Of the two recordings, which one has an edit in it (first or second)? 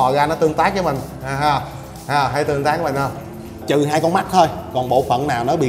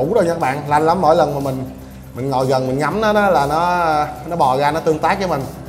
first